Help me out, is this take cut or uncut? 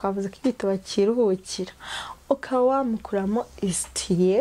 uncut